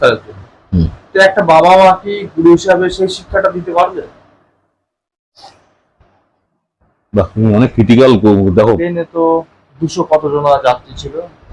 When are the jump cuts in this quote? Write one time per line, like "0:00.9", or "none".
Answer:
0:08.8